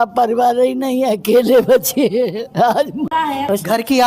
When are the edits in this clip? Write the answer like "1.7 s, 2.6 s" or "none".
3.1 s

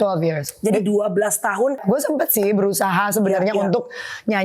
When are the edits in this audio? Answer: 1.8 s

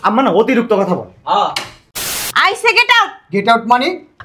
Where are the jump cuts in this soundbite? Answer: 1.9 s

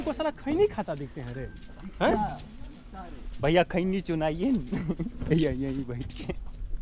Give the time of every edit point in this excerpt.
none

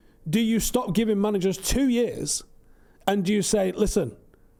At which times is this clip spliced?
none

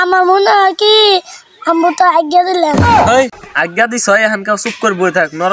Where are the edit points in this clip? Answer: 3.4 s

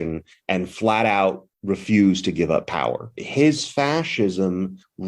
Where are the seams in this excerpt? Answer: 3.1 s

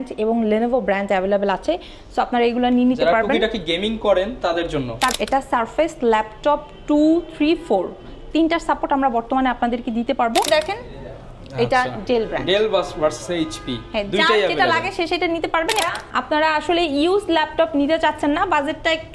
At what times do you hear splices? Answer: 5.1 s, 10.5 s, 15.8 s

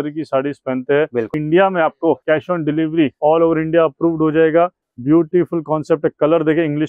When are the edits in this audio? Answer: 1.4 s, 2.2 s, 3.1 s, 4.9 s

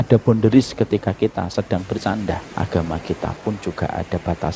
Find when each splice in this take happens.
2.5 s

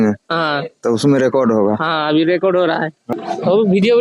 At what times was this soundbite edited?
3.0 s

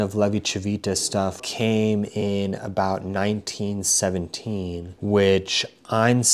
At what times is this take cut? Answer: 1.4 s, 4.9 s

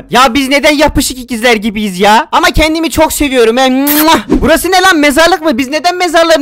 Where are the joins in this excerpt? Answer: 4.3 s

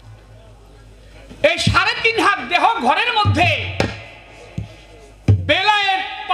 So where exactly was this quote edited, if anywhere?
none

